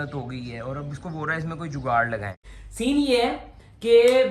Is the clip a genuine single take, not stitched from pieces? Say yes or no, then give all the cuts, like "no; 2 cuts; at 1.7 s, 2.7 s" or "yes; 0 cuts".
no; 1 cut; at 2.6 s